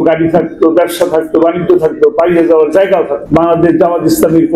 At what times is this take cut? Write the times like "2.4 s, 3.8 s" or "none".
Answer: 3.2 s